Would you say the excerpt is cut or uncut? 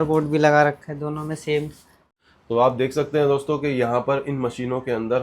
cut